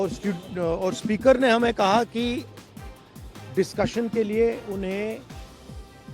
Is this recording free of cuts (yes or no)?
no